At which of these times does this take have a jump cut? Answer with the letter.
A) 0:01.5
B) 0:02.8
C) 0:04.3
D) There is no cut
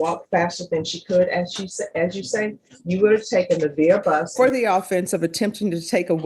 C